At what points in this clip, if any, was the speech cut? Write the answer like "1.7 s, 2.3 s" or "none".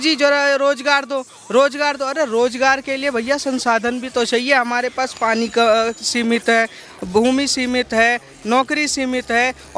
none